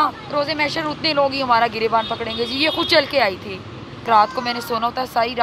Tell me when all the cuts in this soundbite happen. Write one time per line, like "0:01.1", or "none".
0:04.0

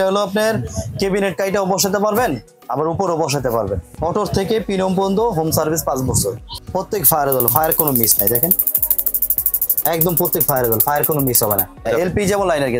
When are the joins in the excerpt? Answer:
0:03.9
0:06.5
0:11.9

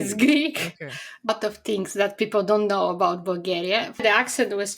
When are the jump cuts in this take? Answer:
0:01.3
0:04.0

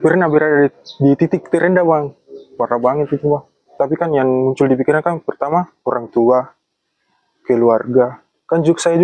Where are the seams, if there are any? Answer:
0:03.7

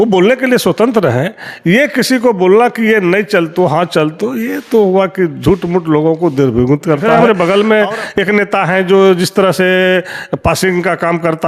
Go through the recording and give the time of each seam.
0:07.1

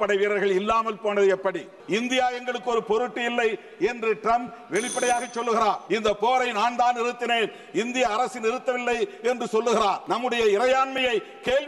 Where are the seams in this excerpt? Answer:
0:01.7
0:05.8
0:10.0

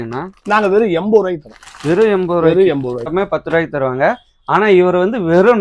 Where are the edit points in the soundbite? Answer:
0:03.1

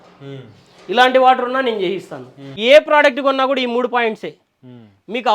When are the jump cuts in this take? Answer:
0:02.5

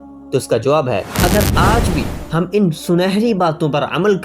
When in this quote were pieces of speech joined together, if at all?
0:01.1

